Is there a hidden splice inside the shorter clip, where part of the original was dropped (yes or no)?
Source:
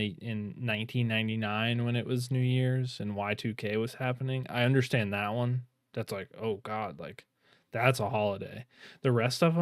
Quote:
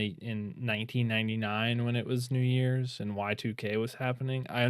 no